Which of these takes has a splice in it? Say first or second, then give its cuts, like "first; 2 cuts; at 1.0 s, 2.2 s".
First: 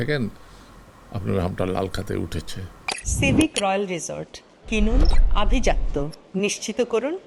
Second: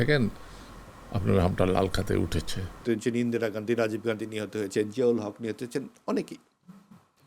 second; 1 cut; at 2.8 s